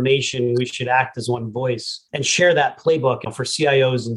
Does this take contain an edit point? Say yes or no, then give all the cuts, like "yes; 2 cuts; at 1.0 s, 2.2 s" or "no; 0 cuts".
yes; 2 cuts; at 2.0 s, 3.2 s